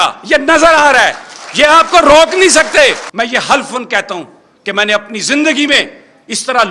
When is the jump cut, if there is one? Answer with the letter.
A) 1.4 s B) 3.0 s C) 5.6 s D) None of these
B